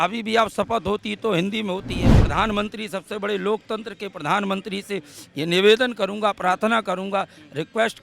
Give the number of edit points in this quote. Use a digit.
1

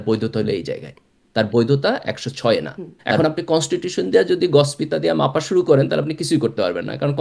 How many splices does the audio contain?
1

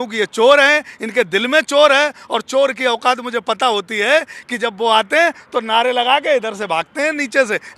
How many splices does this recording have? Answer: 0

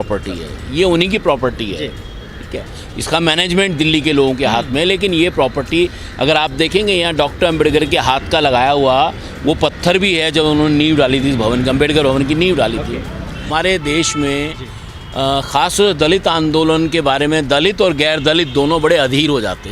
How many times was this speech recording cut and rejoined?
1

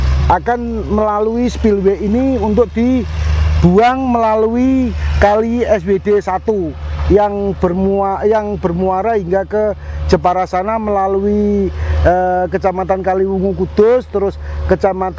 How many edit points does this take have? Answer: 0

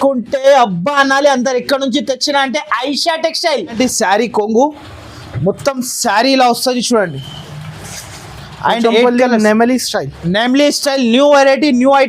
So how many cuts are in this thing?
1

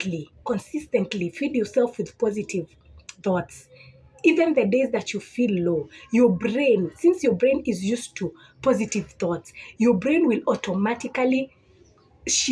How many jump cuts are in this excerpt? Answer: 0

